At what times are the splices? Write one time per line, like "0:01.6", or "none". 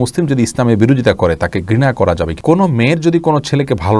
0:02.4